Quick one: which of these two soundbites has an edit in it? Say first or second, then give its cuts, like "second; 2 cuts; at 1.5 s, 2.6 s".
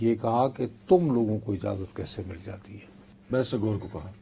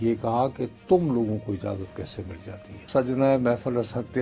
second; 1 cut; at 2.9 s